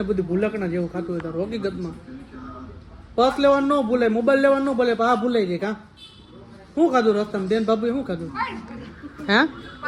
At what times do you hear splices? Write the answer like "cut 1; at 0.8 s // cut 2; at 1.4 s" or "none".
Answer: none